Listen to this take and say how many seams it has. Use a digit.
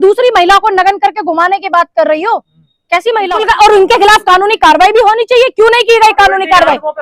1